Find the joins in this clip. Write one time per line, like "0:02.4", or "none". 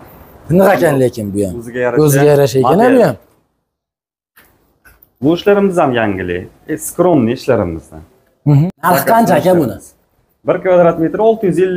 0:08.6